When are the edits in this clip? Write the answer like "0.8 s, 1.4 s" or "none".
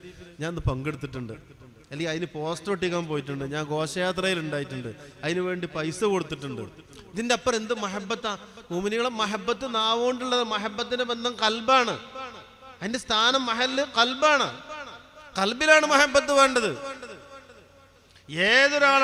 none